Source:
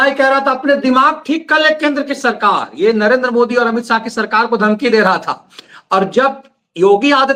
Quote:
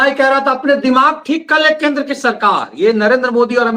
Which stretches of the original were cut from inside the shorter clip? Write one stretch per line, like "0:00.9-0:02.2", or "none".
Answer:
none